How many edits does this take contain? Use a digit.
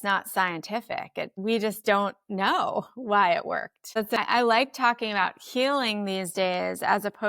2